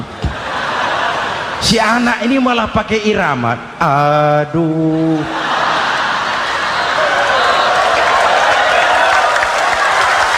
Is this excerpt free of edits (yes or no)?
yes